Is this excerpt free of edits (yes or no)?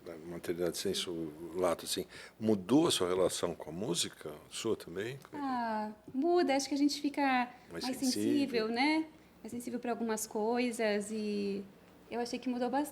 yes